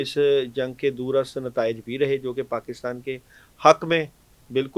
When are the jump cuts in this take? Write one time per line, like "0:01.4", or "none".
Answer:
none